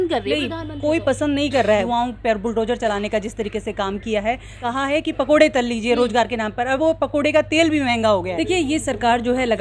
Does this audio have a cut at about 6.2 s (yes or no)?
no